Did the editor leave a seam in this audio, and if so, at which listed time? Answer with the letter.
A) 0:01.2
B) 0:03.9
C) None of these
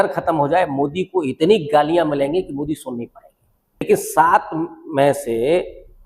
B